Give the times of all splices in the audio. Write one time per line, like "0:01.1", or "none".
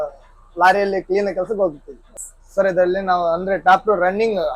0:02.0

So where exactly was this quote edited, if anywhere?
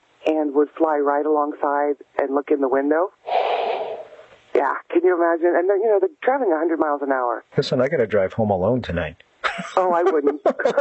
none

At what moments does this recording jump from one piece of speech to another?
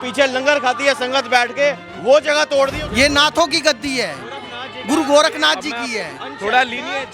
0:02.8

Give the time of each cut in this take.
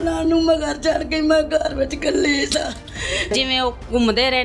0:03.3

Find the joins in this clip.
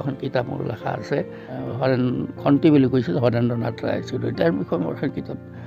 0:01.5

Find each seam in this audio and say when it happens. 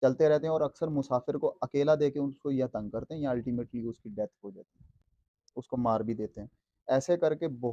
none

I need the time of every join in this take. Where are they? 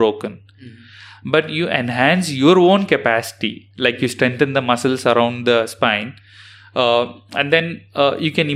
none

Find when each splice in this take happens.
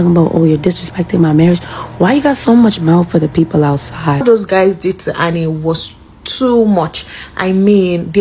0:04.2

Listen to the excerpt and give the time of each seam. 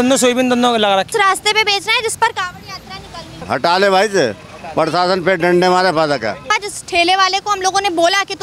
0:01.1
0:03.4
0:06.4

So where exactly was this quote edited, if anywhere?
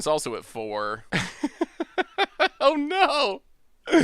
0:01.0

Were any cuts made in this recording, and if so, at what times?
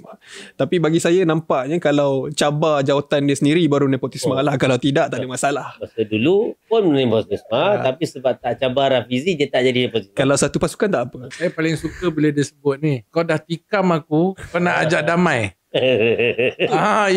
0:11.3
0:13.0

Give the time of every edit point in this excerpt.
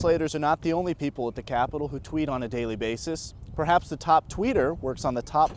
none

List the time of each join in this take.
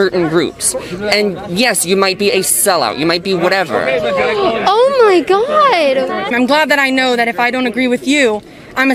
0:06.3

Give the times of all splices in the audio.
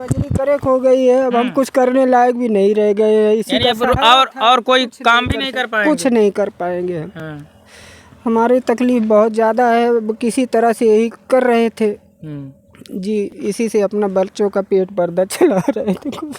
none

